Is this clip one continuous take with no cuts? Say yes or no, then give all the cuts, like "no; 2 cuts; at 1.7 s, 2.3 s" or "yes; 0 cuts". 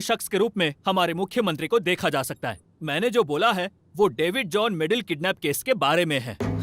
yes; 0 cuts